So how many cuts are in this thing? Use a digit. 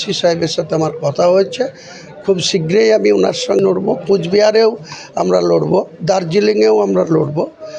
1